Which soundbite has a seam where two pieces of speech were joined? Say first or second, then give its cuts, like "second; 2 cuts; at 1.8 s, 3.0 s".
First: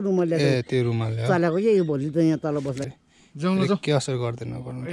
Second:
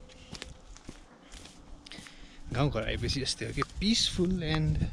first; 1 cut; at 2.8 s